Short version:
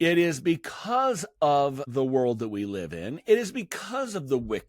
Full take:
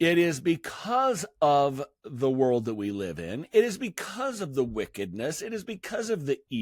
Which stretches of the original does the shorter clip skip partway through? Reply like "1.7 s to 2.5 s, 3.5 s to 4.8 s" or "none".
1.8 s to 2.1 s